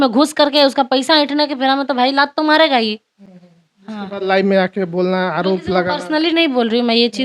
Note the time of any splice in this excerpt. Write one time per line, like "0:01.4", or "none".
none